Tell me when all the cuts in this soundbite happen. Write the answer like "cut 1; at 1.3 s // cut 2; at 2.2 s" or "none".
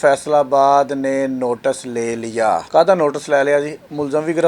cut 1; at 2.6 s